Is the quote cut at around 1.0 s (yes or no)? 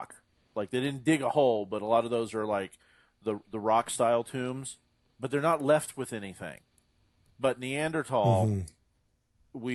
no